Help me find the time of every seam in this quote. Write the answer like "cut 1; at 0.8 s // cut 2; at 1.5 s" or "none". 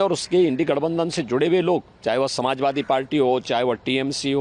cut 1; at 1.9 s